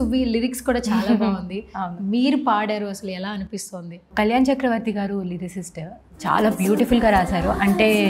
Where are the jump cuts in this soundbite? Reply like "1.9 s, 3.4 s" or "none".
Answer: none